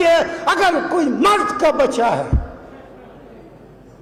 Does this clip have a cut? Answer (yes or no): no